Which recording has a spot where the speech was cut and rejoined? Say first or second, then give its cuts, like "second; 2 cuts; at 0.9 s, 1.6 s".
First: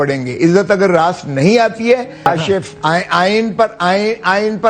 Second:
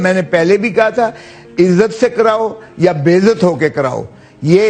first; 1 cut; at 2.3 s